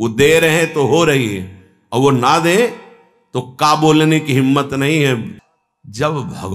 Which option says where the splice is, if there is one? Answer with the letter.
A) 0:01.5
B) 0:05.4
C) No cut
B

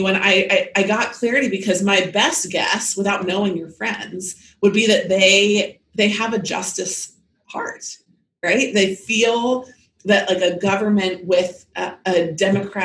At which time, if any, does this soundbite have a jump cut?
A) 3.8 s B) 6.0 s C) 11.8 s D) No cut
D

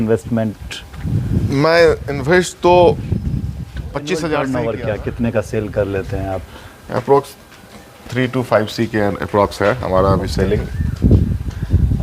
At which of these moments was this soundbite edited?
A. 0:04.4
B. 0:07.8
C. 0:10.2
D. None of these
A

